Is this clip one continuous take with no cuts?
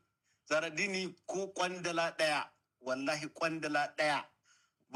yes; 0 cuts

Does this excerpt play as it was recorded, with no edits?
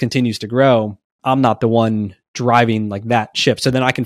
no; 1 cut; at 1.1 s

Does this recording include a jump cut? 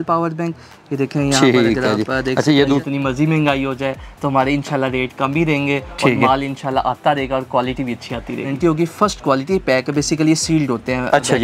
yes; 2 cuts; at 2.8 s, 8.5 s

